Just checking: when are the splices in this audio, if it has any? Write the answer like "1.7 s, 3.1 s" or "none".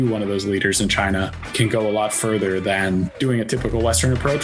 1.4 s, 3.1 s